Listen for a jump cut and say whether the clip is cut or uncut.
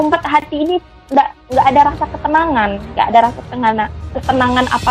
uncut